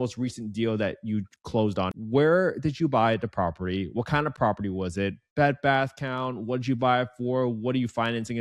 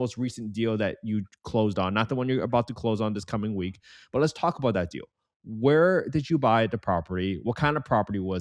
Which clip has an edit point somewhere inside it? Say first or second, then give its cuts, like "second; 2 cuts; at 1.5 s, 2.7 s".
first; 1 cut; at 1.9 s